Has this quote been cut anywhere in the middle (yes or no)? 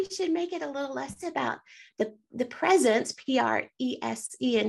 no